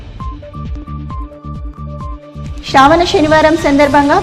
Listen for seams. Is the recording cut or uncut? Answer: cut